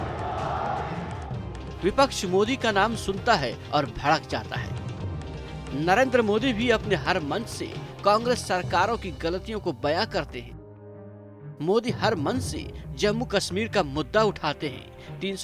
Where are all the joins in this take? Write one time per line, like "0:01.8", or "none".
0:04.6
0:05.7